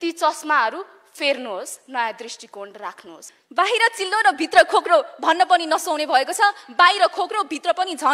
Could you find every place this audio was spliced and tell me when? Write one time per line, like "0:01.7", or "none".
0:03.4